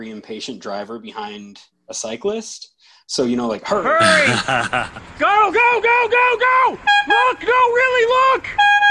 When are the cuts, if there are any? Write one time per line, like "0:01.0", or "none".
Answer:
0:03.8